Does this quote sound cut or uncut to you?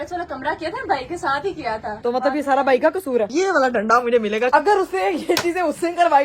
cut